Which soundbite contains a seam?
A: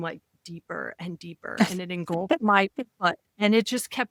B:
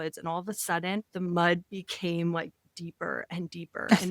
B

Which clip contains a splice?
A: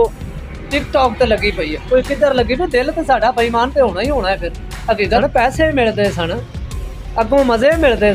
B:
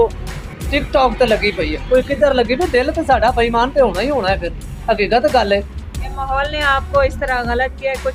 A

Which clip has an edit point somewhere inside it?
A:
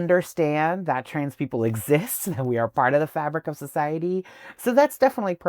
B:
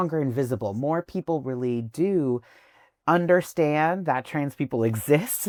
A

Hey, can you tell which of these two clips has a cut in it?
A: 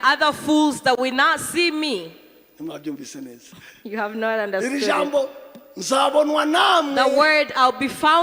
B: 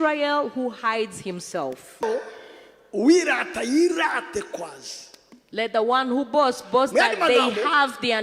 B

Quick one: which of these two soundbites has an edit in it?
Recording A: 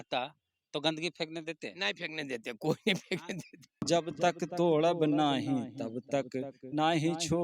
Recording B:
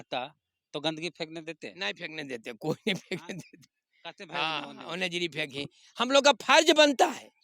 A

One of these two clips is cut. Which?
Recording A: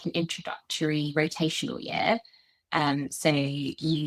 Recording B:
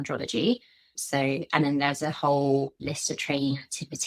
B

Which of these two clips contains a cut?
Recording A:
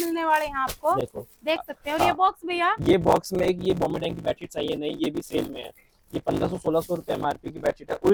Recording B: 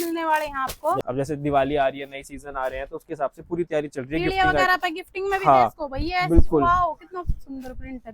B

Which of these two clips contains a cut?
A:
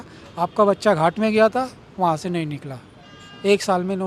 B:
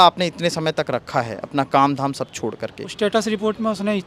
B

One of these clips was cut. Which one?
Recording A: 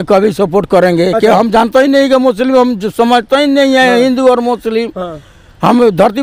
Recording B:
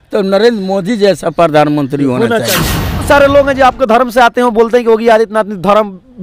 B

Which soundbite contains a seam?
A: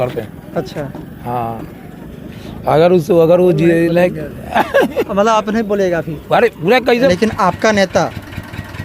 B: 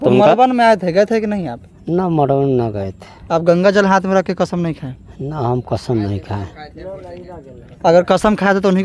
A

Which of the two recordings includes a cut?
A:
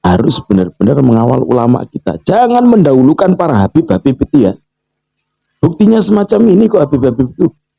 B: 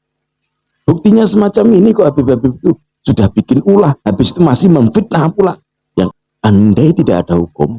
B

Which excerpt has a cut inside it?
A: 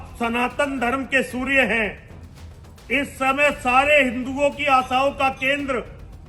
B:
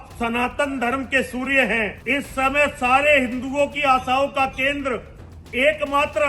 B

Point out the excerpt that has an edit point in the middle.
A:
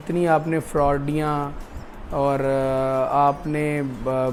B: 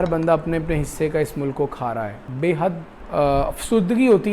B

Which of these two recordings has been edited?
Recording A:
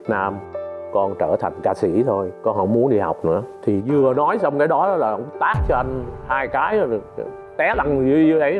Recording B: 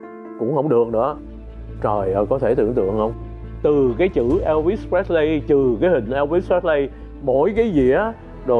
B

